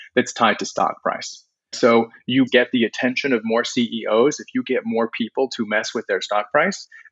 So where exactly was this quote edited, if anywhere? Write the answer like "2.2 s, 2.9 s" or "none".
1.7 s, 2.5 s